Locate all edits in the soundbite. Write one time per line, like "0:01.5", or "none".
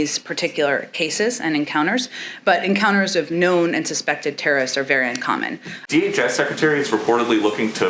0:05.8